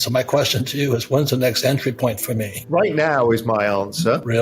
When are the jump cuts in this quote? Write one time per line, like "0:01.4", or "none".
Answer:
0:02.5

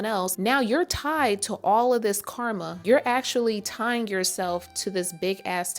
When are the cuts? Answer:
0:02.7

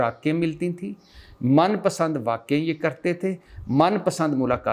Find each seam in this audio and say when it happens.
none

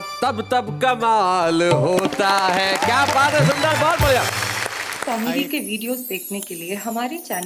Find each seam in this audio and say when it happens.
0:04.9

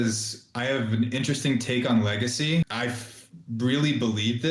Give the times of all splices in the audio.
0:02.7

